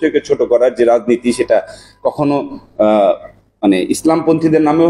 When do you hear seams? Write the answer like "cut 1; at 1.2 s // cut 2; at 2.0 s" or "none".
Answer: none